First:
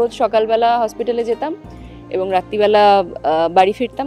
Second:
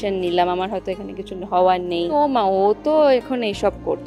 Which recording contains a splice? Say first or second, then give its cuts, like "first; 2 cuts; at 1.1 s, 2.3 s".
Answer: second; 1 cut; at 2.1 s